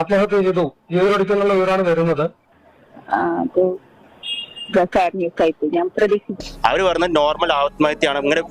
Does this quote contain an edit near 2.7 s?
no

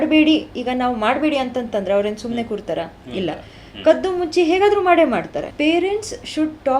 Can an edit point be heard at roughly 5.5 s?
yes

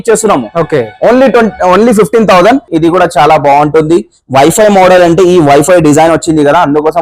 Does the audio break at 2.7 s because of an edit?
yes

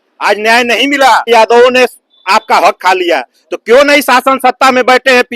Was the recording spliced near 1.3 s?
yes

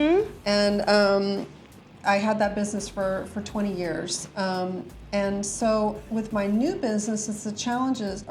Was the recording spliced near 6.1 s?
no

